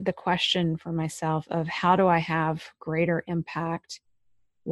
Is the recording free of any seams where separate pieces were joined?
yes; 0 cuts

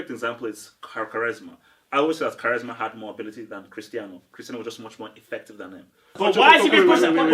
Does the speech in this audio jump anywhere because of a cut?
yes; 1 cut; at 6.2 s

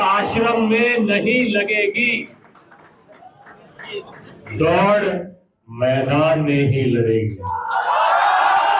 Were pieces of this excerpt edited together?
no; 0 cuts

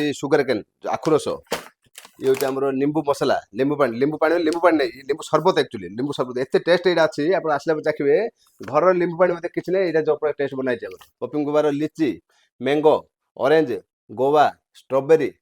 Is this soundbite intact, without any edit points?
no; 1 cut; at 11.2 s

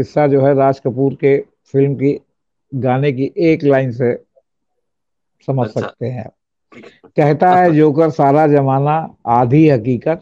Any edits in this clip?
no; 0 cuts

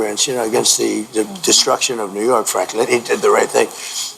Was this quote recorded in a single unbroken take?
yes; 0 cuts

